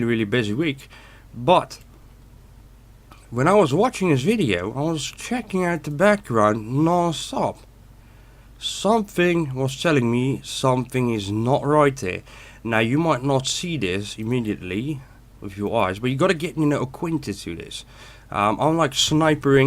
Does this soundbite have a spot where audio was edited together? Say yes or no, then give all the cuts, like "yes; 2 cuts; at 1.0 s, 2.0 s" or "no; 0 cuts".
yes; 1 cut; at 15.1 s